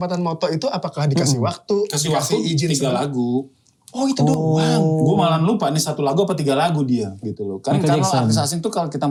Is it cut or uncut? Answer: uncut